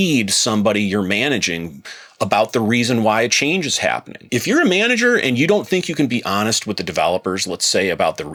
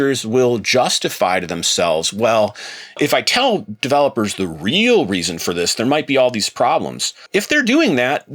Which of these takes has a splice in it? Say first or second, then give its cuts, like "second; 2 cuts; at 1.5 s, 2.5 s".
second; 2 cuts; at 3.0 s, 7.2 s